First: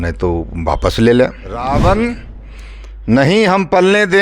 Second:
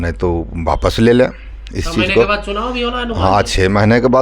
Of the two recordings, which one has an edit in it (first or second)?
first